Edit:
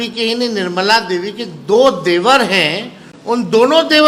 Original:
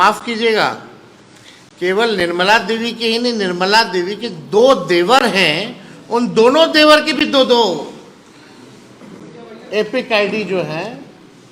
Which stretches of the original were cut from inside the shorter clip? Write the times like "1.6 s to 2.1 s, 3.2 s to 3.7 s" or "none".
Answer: none